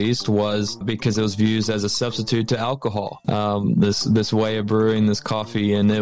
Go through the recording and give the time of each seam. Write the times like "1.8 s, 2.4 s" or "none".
0.8 s, 3.2 s